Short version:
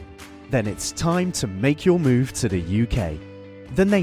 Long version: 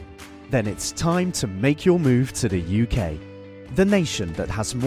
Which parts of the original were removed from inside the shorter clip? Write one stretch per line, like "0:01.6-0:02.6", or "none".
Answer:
none